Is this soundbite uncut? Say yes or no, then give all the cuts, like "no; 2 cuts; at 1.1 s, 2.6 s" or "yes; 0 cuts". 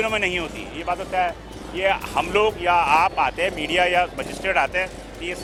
yes; 0 cuts